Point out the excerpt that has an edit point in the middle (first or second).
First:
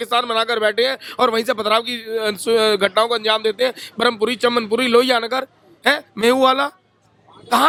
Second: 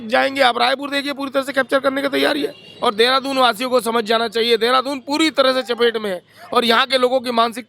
second